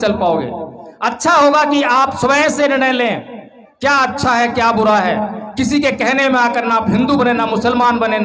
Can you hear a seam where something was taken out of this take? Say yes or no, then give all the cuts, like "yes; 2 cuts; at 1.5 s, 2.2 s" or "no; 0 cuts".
no; 0 cuts